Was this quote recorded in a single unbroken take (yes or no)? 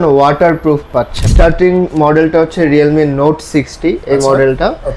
no